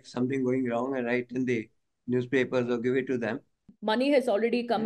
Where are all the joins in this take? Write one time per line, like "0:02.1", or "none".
0:03.7